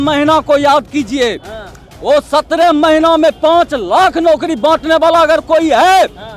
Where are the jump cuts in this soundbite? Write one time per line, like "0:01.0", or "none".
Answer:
none